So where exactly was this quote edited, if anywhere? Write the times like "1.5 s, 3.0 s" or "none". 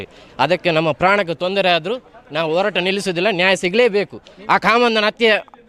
none